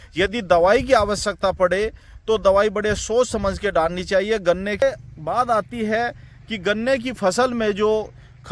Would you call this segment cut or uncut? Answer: cut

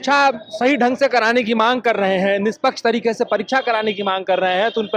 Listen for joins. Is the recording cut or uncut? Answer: uncut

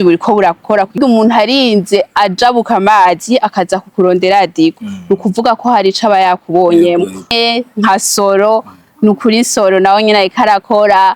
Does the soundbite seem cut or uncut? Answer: cut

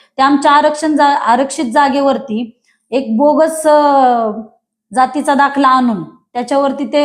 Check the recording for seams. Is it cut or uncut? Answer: uncut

